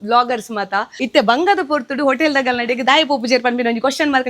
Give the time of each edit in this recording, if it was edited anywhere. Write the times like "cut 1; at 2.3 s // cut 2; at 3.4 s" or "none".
cut 1; at 1.0 s